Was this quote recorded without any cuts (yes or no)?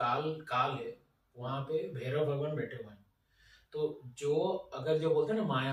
yes